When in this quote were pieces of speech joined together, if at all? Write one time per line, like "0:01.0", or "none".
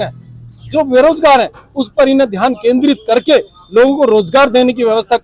none